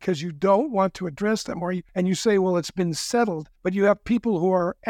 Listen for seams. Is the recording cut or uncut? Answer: cut